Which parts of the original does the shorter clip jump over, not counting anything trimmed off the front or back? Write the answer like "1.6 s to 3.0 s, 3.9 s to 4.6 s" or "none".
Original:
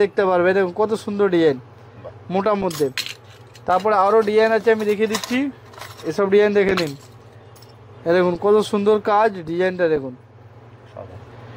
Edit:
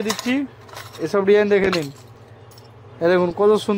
none